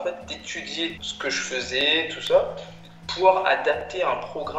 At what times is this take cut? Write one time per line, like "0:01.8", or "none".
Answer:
0:01.0